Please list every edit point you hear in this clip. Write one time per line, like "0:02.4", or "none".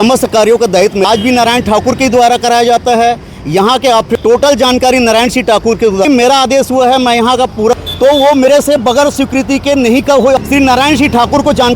0:01.0
0:04.1
0:06.1
0:07.8
0:10.4